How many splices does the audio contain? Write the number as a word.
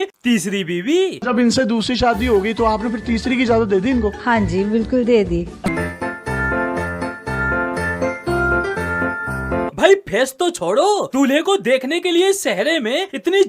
one